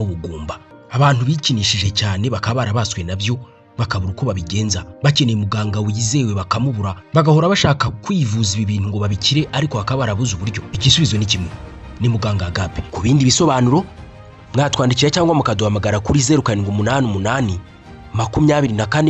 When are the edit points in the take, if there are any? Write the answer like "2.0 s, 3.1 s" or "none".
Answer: none